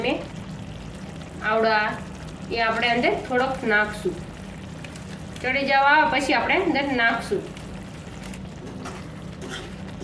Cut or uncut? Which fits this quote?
uncut